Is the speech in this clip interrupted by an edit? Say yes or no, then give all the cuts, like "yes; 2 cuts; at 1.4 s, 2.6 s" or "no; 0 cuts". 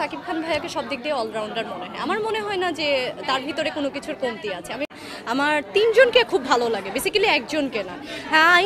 yes; 1 cut; at 4.9 s